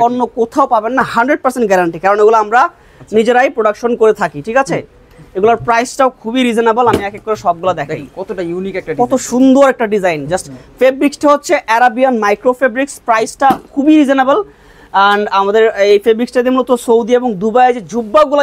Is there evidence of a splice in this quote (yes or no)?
no